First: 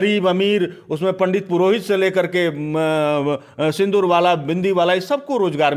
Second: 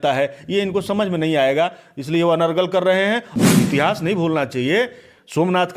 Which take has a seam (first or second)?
second